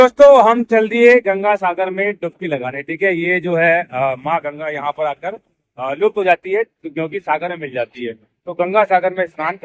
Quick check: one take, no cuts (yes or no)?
yes